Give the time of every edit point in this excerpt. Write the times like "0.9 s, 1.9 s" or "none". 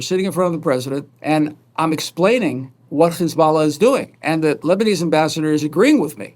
1.1 s, 4.6 s